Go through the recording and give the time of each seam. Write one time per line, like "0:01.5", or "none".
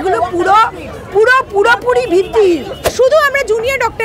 0:02.9